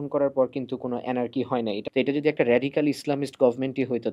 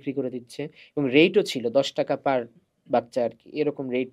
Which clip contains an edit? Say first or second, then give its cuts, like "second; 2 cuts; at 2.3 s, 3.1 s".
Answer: first; 1 cut; at 1.8 s